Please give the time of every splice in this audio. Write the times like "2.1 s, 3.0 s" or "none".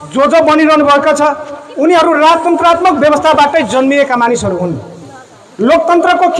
none